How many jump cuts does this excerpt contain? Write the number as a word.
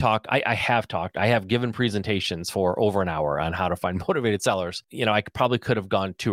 one